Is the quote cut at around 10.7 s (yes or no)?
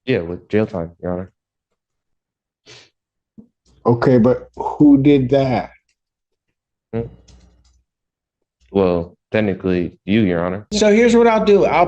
yes